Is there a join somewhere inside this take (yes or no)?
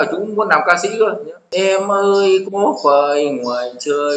yes